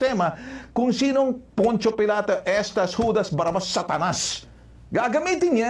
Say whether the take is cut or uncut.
uncut